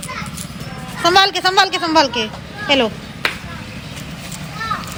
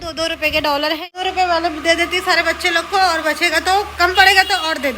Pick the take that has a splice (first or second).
second